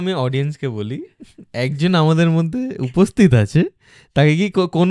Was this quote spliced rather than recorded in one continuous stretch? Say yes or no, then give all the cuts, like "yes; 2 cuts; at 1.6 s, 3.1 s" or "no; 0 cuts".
no; 0 cuts